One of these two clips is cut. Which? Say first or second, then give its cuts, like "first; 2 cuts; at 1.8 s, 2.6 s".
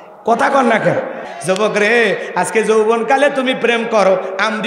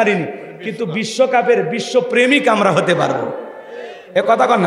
first; 1 cut; at 1.3 s